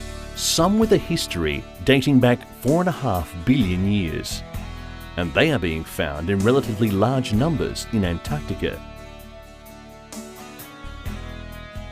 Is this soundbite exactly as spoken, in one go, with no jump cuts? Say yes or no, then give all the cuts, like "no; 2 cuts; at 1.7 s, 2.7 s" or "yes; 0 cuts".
no; 1 cut; at 7.8 s